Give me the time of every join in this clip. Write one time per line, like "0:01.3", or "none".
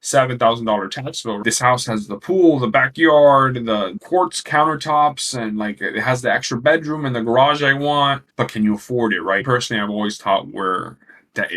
0:01.5
0:03.9
0:09.4